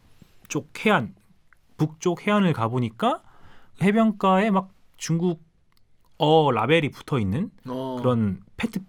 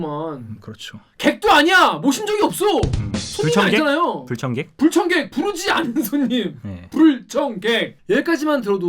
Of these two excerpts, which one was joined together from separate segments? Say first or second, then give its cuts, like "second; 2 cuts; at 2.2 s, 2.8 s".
second; 1 cut; at 7.9 s